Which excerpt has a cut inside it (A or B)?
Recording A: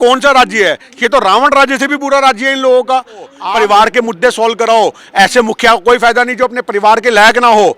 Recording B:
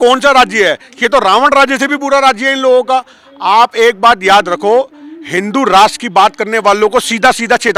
A